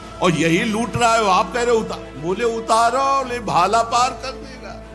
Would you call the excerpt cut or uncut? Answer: uncut